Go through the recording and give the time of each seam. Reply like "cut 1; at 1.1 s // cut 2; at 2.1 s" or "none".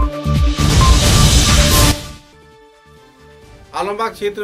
none